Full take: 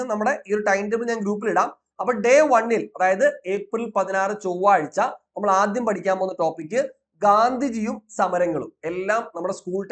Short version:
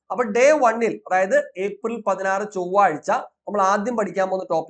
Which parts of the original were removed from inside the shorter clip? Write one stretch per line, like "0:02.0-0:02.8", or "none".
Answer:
none